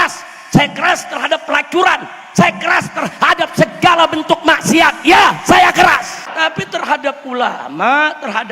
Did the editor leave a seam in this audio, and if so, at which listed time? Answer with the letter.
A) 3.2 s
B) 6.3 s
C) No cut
B